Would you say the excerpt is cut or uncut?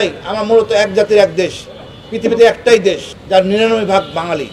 cut